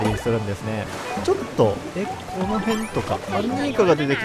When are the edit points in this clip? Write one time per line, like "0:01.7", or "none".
0:00.9